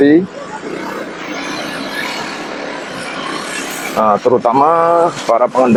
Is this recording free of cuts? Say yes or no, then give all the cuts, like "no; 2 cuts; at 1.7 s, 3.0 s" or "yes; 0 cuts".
yes; 0 cuts